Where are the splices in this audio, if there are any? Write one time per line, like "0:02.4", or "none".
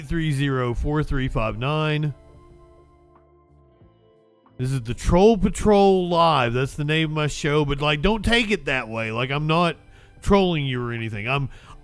none